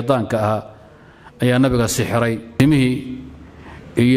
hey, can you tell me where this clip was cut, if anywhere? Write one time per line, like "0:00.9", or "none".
0:02.5